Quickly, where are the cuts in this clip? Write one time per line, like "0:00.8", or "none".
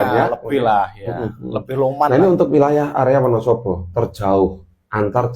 0:02.1